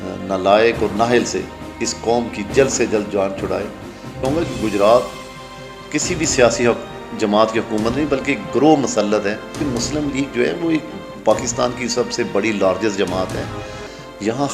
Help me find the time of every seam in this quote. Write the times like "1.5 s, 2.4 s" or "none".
4.2 s, 9.5 s